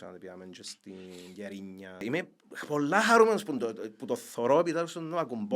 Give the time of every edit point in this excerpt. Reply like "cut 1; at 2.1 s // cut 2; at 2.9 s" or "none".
cut 1; at 2.0 s